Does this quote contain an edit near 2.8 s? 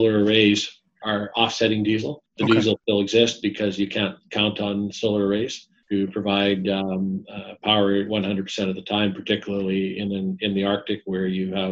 yes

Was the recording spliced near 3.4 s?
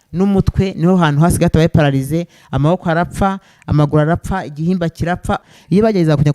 no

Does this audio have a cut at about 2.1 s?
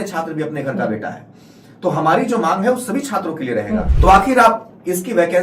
no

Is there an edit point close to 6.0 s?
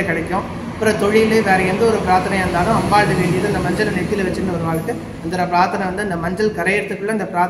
no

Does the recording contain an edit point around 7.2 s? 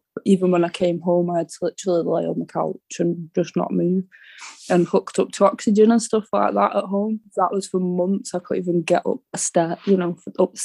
yes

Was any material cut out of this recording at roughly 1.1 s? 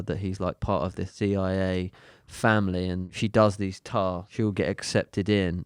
yes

